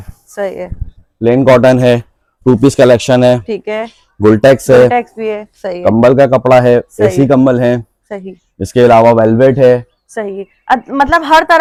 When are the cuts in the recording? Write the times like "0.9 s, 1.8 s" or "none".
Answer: none